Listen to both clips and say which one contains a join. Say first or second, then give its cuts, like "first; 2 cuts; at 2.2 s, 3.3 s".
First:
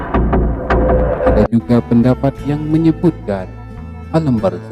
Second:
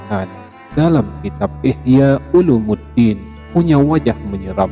second; 1 cut; at 3.3 s